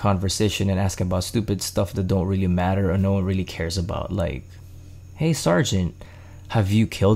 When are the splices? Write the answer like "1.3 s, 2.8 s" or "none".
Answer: none